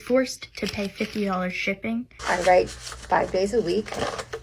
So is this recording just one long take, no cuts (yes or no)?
no